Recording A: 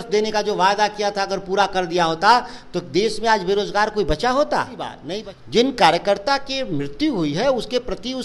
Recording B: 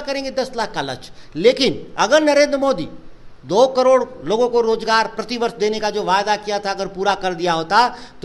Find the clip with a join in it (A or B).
A